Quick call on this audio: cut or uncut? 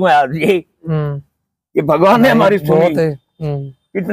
uncut